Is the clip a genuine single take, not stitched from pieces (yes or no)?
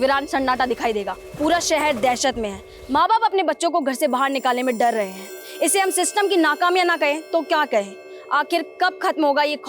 no